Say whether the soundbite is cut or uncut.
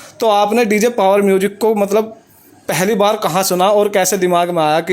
uncut